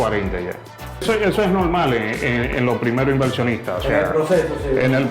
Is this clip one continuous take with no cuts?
no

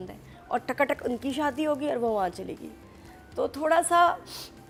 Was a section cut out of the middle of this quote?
no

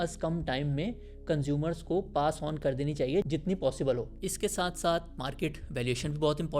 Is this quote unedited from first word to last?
no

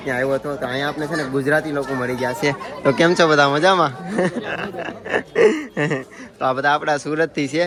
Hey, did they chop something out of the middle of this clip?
no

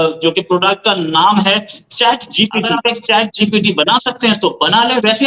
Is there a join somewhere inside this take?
yes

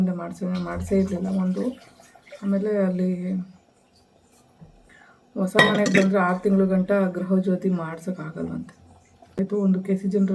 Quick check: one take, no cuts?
no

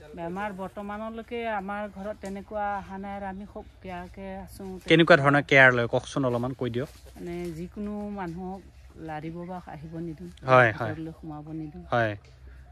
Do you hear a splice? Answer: no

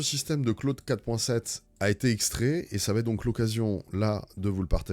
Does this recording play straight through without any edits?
yes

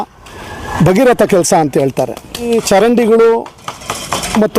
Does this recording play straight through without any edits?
no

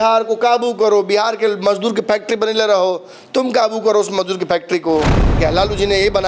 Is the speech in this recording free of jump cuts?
no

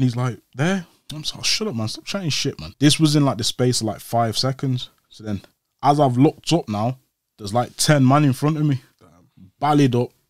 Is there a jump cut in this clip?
yes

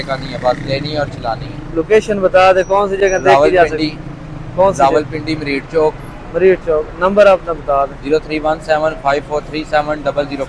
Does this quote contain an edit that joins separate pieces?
no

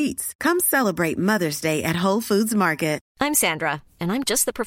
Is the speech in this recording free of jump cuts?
no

